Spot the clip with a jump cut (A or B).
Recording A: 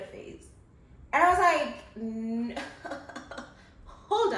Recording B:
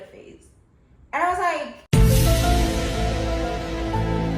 A